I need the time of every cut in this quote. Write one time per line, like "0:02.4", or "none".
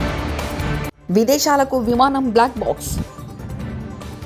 0:00.9